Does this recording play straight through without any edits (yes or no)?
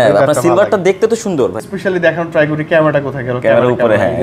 no